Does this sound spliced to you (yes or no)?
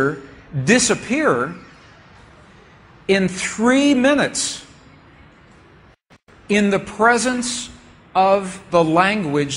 no